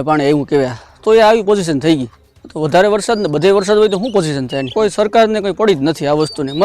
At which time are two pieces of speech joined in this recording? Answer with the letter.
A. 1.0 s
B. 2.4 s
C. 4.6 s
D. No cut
C